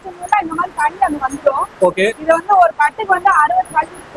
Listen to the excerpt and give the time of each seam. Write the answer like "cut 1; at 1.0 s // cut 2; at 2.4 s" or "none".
none